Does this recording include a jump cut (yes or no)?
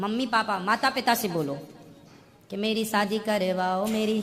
no